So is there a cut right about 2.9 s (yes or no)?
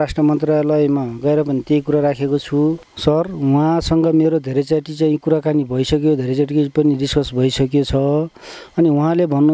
yes